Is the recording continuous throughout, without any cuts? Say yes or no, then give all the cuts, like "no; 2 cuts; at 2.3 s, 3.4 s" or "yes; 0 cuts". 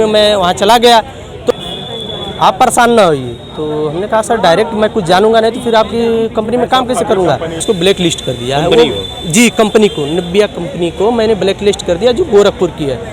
no; 2 cuts; at 1.2 s, 7.6 s